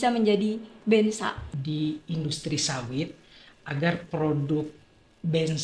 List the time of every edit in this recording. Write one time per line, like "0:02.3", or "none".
0:01.5